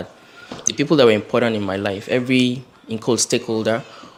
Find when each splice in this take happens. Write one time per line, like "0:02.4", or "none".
none